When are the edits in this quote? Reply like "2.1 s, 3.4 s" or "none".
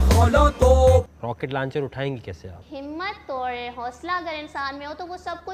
1.0 s